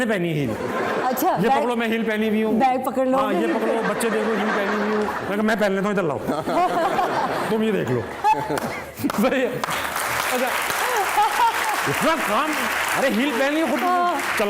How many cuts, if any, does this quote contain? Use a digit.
0